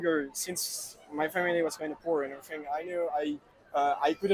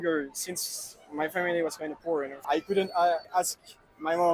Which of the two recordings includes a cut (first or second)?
second